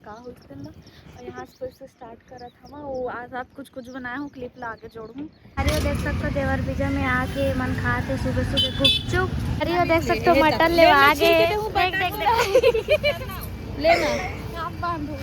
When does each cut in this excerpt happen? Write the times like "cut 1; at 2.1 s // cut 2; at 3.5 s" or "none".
cut 1; at 5.5 s // cut 2; at 9.6 s